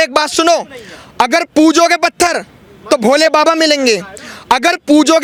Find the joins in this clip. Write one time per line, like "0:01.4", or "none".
none